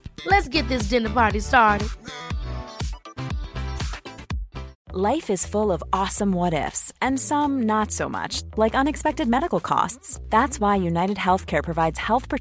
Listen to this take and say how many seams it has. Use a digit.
1